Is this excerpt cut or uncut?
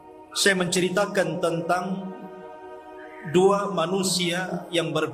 uncut